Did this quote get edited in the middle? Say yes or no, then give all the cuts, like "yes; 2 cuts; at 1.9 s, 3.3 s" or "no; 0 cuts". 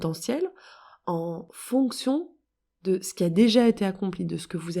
yes; 1 cut; at 1.5 s